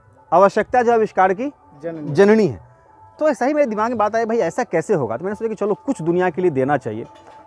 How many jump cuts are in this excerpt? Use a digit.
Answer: 0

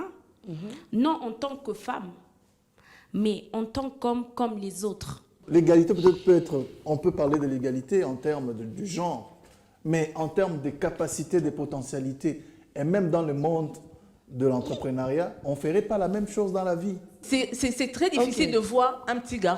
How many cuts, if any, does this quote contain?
2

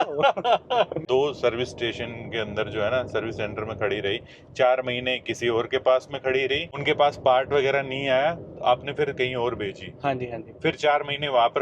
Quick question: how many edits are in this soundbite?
2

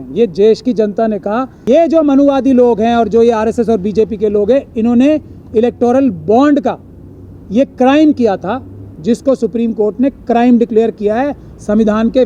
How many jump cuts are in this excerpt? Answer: 1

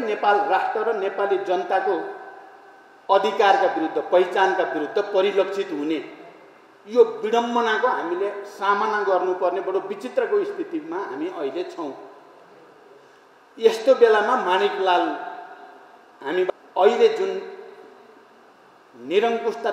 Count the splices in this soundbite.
1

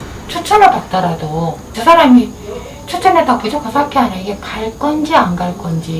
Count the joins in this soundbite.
1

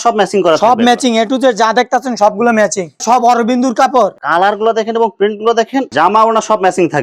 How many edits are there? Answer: 2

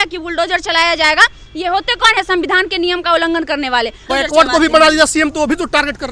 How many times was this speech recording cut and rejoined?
1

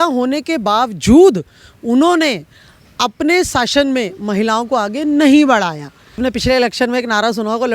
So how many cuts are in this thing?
1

